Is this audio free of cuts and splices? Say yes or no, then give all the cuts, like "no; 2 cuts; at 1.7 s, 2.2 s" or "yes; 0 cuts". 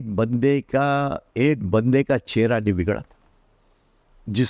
yes; 0 cuts